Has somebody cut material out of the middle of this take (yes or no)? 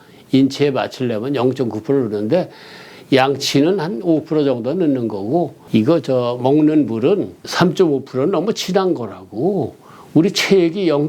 yes